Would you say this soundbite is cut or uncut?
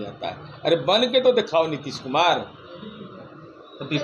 uncut